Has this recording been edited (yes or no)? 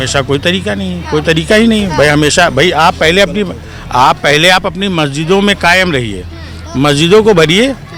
no